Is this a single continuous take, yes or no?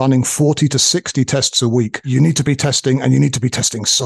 no